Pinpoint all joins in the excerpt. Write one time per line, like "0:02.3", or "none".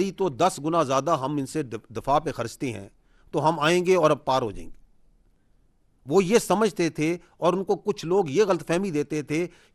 none